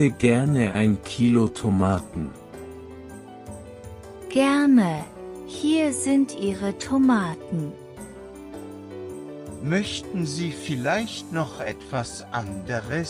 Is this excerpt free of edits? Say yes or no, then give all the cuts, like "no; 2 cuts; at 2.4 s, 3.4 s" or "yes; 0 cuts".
yes; 0 cuts